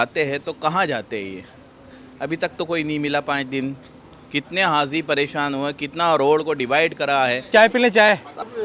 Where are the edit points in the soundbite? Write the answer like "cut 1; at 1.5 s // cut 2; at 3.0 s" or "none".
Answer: cut 1; at 7.4 s